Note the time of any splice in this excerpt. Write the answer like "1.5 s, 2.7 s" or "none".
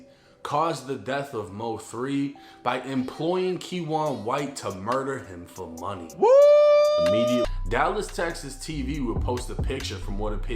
7.4 s